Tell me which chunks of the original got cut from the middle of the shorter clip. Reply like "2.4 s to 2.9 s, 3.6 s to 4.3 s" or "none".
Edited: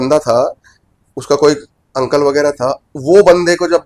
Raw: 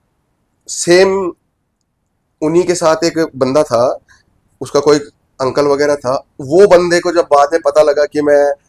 none